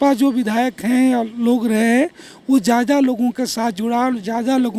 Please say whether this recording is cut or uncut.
uncut